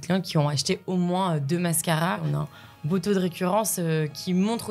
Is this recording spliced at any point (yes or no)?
yes